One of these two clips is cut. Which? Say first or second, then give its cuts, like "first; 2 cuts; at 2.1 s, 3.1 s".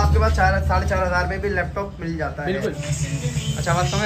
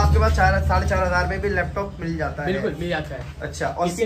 first; 1 cut; at 2.8 s